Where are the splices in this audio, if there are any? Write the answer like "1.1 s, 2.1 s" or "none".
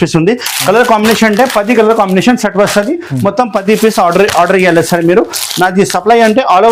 none